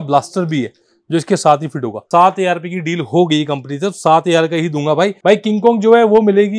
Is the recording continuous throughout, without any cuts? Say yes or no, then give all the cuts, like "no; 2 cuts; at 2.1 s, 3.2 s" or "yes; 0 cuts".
no; 2 cuts; at 2.0 s, 5.2 s